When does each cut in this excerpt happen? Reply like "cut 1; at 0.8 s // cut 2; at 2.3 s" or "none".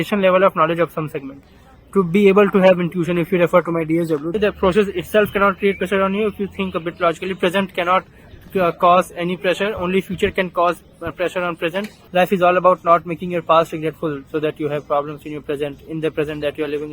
cut 1; at 4.3 s // cut 2; at 12.0 s